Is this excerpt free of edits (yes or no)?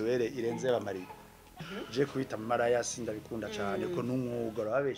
no